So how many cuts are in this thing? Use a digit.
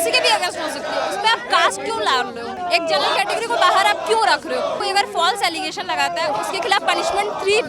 2